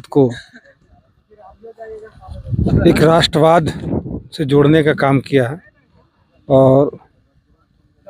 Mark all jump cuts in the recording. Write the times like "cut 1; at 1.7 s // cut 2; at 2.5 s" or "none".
none